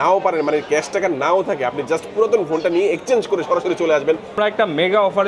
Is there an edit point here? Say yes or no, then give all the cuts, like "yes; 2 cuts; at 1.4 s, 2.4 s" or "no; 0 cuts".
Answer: yes; 1 cut; at 4.3 s